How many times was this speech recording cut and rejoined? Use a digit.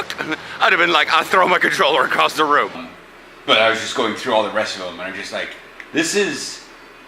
1